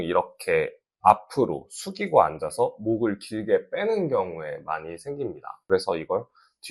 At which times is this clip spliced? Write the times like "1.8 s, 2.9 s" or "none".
5.5 s